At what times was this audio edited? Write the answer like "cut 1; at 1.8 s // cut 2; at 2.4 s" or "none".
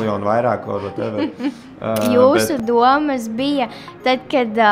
cut 1; at 2.1 s

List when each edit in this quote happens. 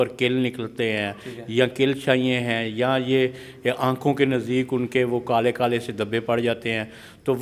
none

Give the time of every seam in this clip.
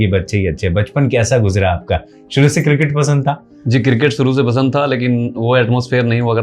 cut 1; at 3.5 s

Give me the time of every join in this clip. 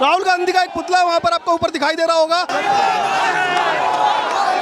cut 1; at 2.5 s

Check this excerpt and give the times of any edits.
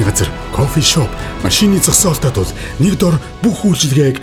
none

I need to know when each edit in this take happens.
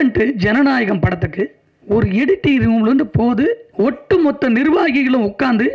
cut 1; at 1.7 s // cut 2; at 3.7 s

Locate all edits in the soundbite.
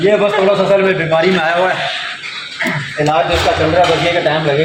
none

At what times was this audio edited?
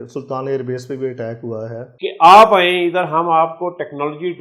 cut 1; at 1.9 s

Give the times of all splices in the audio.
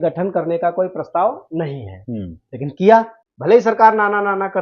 cut 1; at 3.2 s

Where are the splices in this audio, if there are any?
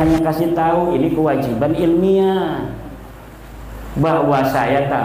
none

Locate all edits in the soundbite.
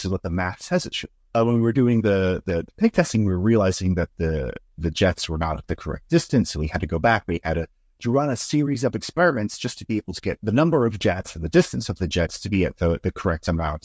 cut 1; at 1.4 s // cut 2; at 10.4 s

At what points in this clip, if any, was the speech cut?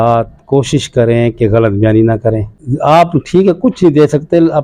cut 1; at 2.7 s

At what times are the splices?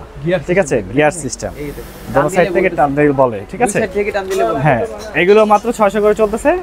none

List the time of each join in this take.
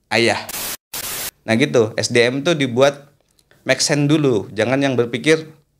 cut 1; at 1.0 s

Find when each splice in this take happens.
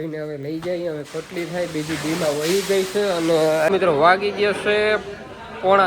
cut 1; at 3.7 s

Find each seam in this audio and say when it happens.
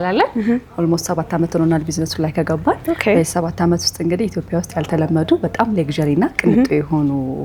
none

